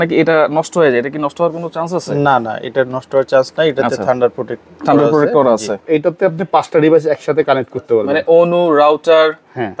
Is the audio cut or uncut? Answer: cut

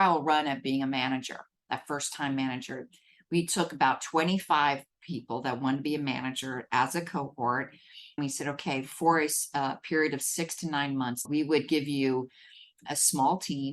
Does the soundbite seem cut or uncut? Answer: cut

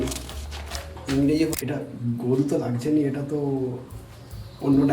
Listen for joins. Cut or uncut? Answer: cut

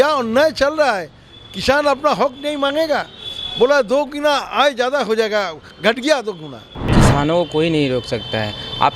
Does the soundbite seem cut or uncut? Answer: cut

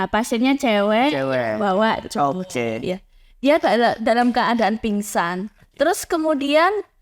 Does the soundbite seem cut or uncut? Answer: uncut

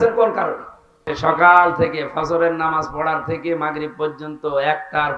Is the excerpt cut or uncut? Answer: cut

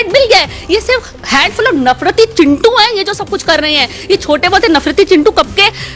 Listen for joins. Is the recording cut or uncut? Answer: uncut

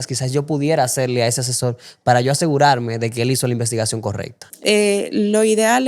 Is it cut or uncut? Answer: cut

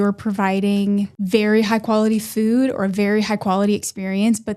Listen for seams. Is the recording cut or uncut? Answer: cut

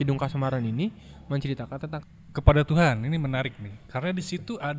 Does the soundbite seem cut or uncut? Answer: cut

